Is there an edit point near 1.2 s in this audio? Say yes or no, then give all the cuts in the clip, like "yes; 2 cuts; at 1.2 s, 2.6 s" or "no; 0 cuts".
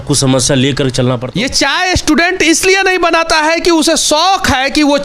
yes; 1 cut; at 1.2 s